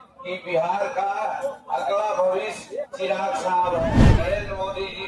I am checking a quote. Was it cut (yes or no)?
yes